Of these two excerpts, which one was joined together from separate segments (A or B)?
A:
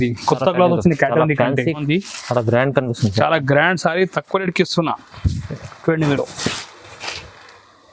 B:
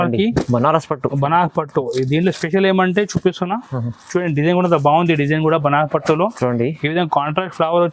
A